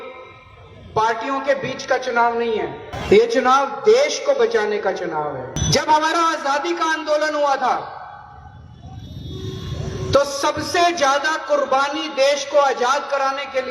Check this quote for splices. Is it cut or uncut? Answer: cut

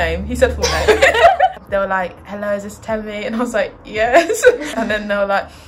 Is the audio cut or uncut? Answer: uncut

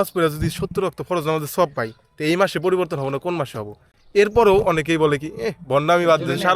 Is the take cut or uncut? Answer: uncut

